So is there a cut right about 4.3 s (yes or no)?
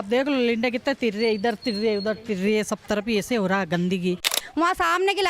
yes